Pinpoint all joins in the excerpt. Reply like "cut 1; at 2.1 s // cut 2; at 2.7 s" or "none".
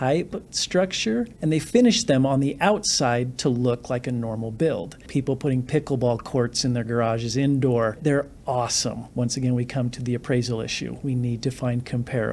cut 1; at 1.3 s // cut 2; at 5.1 s // cut 3; at 8.0 s // cut 4; at 9.0 s